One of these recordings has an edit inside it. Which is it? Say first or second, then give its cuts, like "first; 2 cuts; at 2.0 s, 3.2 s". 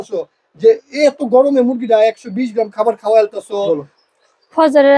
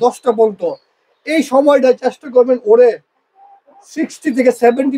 first; 1 cut; at 3.6 s